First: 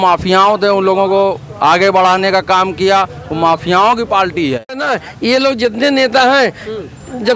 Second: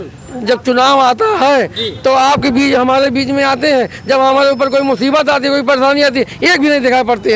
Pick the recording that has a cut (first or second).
first